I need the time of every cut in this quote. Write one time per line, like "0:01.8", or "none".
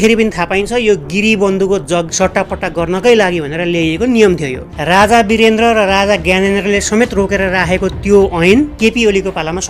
0:02.1
0:04.7